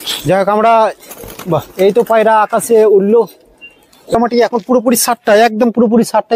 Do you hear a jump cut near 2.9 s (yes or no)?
no